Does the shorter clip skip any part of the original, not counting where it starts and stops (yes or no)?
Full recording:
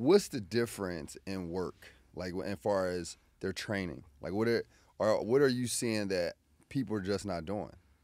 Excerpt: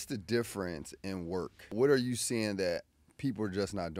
yes